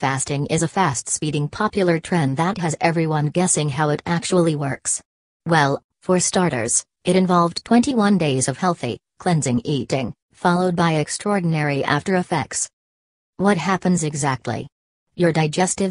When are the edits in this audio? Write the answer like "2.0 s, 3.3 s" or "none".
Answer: 3.7 s